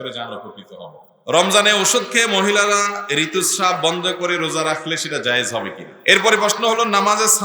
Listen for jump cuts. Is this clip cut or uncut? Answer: cut